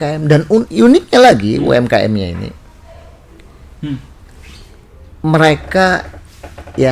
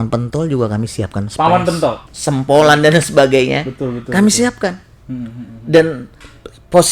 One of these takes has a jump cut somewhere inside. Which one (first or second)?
second